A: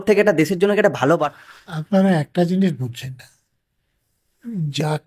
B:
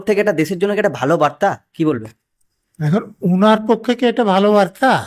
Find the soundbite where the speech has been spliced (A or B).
A